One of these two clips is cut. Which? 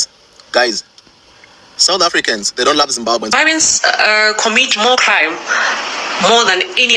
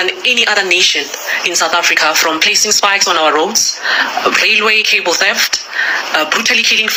first; 1 cut; at 3.3 s

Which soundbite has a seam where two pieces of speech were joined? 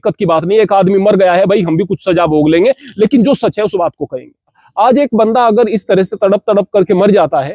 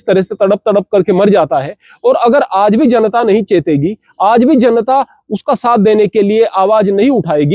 first; 1 cut; at 4.6 s

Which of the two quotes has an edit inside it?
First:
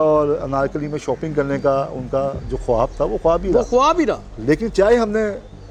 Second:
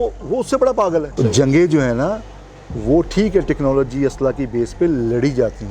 second; 1 cut; at 1.2 s

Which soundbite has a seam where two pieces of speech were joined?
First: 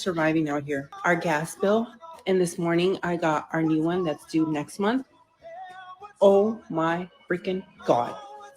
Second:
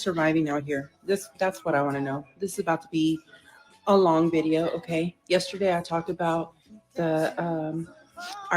first; 1 cut; at 0.9 s

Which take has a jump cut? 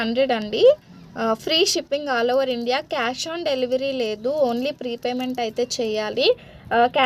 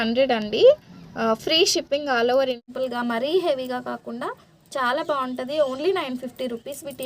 second; 1 cut; at 2.6 s

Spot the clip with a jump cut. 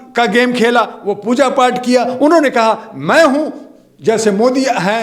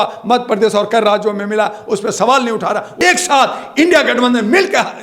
second; 1 cut; at 2.9 s

